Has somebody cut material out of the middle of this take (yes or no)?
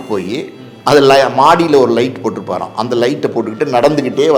no